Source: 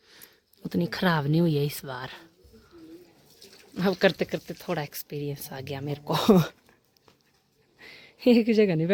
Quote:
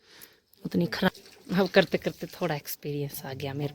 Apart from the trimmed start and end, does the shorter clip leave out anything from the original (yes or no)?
yes